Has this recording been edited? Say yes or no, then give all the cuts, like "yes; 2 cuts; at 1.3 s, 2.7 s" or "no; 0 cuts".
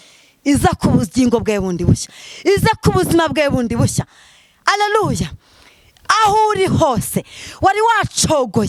no; 0 cuts